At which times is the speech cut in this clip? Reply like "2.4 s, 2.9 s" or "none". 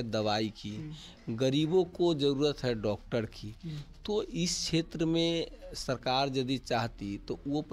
none